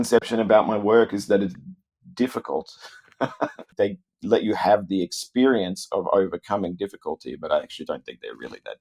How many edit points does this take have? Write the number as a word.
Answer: one